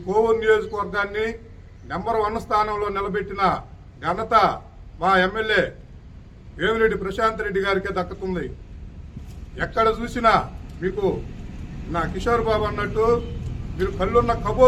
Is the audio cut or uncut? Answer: uncut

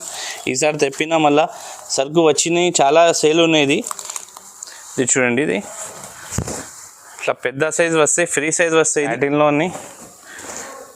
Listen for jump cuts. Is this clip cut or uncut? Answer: cut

